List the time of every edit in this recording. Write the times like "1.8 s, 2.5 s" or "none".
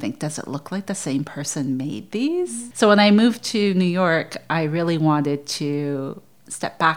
none